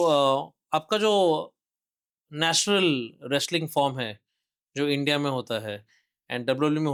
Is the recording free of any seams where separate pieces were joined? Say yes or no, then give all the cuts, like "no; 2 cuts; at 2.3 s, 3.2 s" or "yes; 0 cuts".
yes; 0 cuts